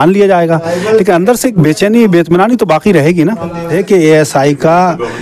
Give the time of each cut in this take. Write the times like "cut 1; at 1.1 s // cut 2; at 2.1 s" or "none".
cut 1; at 3.7 s